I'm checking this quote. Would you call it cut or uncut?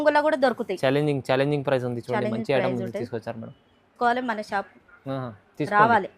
uncut